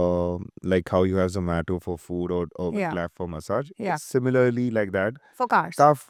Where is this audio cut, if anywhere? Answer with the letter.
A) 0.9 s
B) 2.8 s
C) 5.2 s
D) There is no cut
D